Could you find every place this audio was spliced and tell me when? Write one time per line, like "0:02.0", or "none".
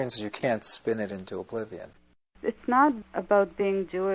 0:02.4

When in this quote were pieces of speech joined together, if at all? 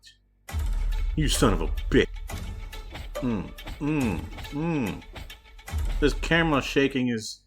0:02.2

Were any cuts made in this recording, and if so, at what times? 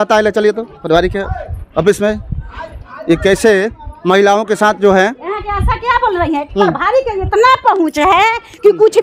none

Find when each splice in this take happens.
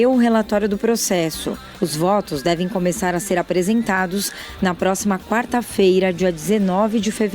0:01.7

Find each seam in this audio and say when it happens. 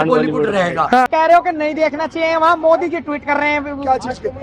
0:01.1

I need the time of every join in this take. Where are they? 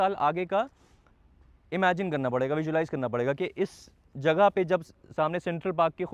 none

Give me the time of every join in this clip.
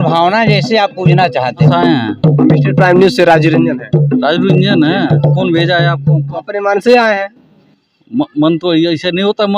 0:01.7
0:05.2
0:06.4

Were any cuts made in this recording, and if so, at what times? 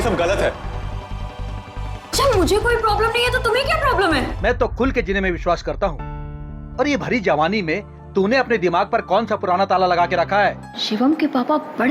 0:04.3
0:10.7

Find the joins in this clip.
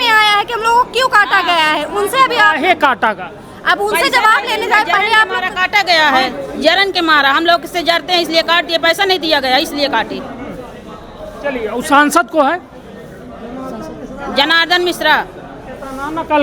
none

